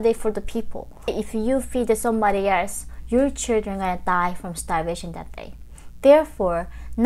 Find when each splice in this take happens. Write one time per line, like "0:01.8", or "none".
0:01.2